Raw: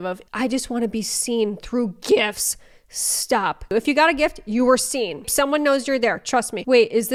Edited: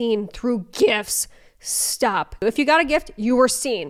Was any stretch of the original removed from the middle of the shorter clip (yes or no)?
no